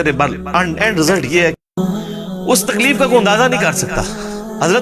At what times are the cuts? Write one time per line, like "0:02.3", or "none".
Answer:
0:01.8